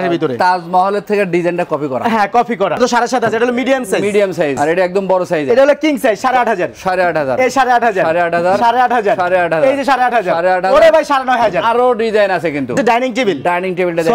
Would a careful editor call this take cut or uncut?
cut